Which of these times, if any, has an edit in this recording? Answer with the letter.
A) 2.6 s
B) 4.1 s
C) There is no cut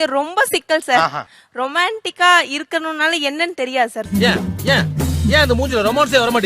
B